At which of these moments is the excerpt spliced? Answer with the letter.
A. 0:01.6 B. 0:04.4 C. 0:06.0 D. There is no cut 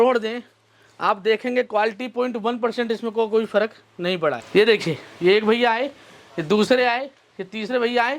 B